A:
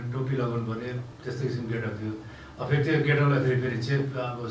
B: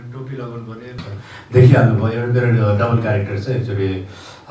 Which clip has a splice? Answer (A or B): B